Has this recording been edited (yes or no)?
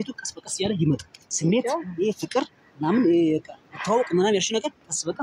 yes